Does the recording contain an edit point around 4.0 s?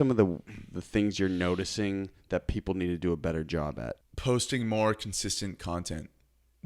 yes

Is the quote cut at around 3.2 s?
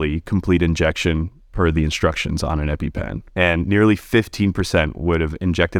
yes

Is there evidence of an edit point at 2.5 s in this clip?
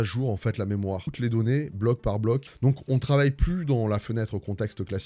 yes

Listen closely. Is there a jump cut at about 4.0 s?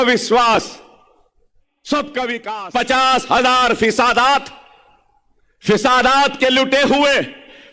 no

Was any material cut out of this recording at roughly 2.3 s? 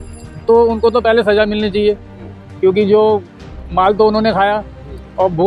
no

